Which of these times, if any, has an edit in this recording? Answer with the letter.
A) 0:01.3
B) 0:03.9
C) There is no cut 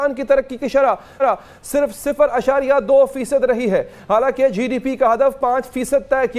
C